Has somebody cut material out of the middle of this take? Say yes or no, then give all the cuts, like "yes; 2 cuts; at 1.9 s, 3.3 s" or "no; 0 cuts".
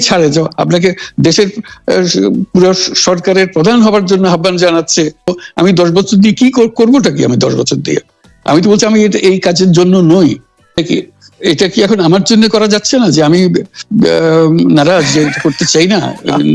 yes; 2 cuts; at 5.4 s, 10.8 s